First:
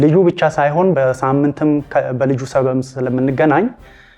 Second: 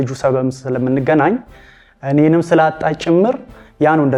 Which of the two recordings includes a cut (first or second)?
first